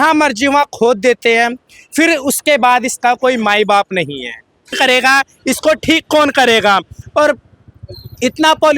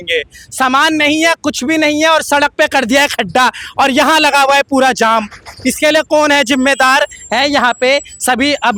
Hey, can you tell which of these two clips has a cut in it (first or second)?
first